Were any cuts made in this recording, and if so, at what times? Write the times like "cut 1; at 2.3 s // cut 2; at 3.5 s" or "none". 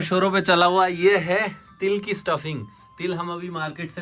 none